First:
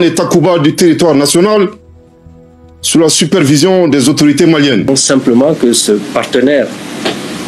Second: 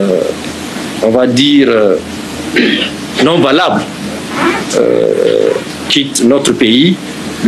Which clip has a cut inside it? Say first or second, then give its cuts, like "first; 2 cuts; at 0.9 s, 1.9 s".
first; 1 cut; at 4.9 s